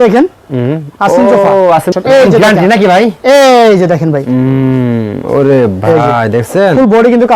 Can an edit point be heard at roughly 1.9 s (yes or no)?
yes